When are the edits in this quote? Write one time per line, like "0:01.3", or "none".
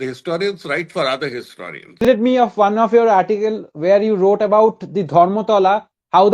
0:02.0